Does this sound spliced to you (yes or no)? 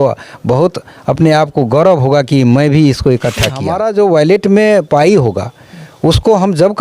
yes